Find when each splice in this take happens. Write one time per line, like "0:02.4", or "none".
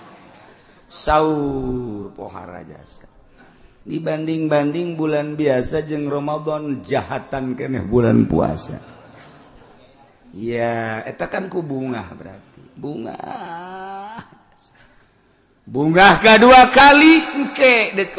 none